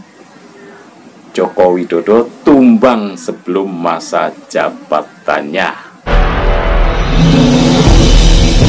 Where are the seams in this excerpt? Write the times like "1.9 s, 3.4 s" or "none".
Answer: 5.9 s